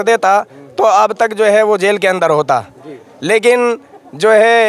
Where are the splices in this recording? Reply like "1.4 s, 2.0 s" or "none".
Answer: none